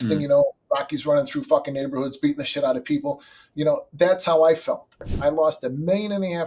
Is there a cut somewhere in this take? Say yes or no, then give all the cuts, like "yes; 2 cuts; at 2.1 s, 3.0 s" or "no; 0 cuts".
yes; 1 cut; at 4.9 s